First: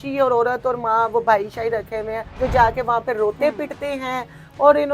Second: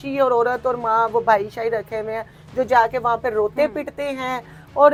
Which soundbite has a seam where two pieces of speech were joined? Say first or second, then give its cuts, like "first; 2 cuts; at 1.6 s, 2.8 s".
first; 1 cut; at 2.2 s